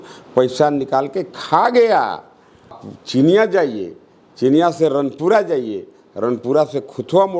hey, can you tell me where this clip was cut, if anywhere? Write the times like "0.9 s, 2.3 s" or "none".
2.9 s